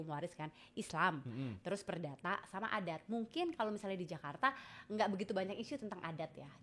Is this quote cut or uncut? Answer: uncut